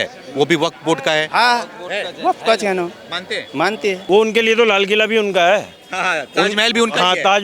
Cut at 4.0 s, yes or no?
yes